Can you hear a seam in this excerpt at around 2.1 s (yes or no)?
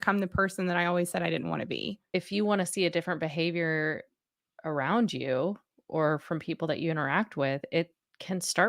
yes